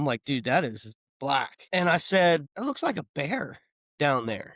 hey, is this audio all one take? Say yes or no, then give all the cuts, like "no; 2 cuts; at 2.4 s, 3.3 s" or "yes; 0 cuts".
no; 2 cuts; at 1.6 s, 2.5 s